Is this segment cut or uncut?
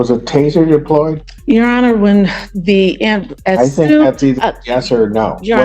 cut